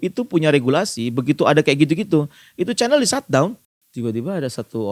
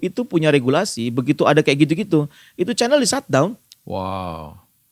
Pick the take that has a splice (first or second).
first